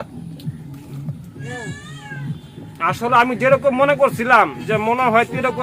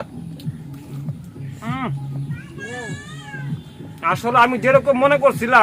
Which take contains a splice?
first; 1 cut; at 1.4 s

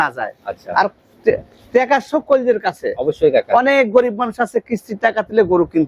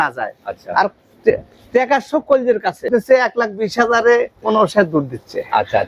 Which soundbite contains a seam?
second; 1 cut; at 2.9 s

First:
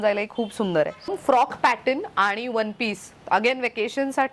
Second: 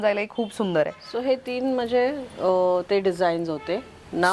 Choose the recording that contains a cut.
first; 1 cut; at 1.1 s

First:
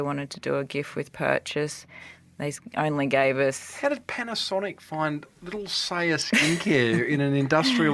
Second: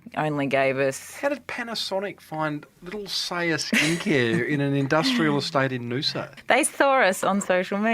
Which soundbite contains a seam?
second; 1 cut; at 6.3 s

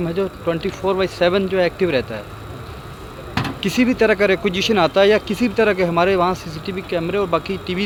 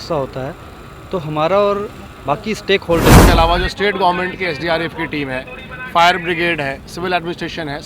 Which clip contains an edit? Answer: second; 1 cut; at 3.2 s

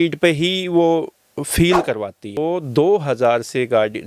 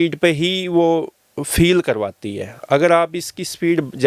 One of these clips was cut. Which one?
first; 1 cut; at 2.4 s

